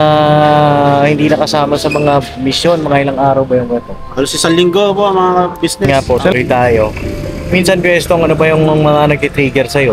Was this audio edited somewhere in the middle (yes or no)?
yes